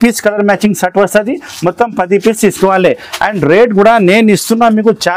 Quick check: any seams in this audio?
no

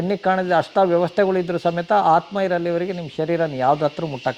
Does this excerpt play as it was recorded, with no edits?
yes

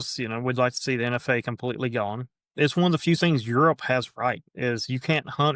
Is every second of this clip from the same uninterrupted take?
no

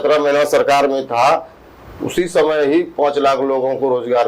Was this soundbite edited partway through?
no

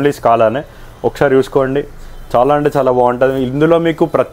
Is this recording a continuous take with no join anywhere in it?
yes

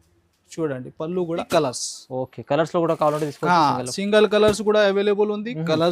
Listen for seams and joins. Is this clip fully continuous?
no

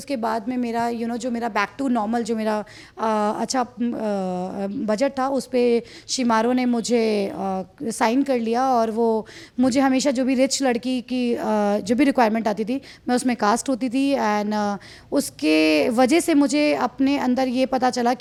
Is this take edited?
no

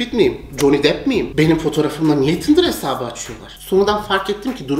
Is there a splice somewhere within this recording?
no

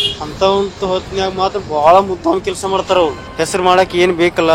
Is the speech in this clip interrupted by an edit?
yes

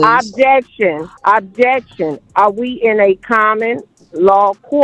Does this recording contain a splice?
yes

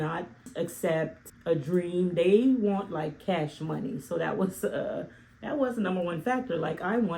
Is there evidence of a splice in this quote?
no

